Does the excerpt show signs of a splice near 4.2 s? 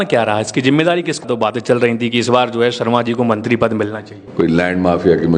yes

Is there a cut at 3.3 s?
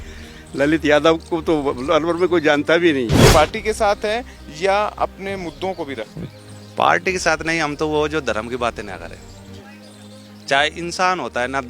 yes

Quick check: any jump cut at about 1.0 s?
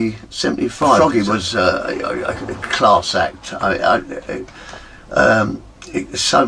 yes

